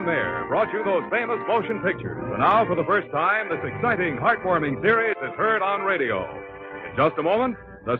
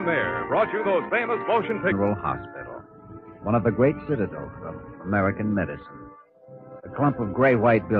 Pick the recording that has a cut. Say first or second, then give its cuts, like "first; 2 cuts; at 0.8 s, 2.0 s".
first; 1 cut; at 1.9 s